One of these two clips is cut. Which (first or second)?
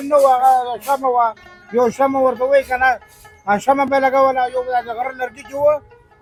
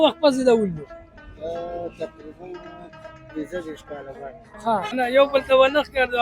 second